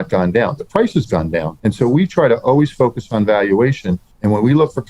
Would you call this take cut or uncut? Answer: cut